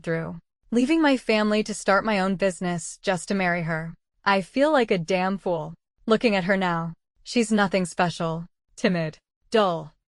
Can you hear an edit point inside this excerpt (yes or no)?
yes